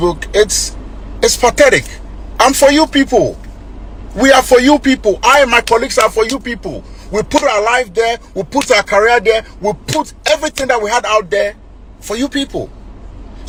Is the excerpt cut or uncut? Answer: uncut